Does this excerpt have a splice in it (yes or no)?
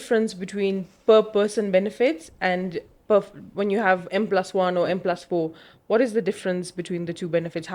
no